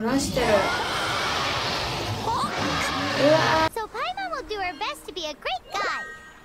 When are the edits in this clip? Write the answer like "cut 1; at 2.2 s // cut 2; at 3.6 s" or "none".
cut 1; at 3.7 s